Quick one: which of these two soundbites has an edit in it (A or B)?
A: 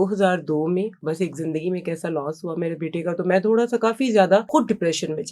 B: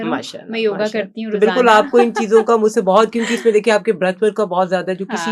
A